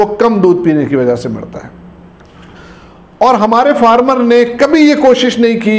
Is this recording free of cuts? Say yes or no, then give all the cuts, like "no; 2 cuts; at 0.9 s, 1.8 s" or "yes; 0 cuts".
yes; 0 cuts